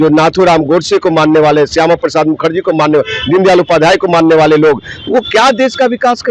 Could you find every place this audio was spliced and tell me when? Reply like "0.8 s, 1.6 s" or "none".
none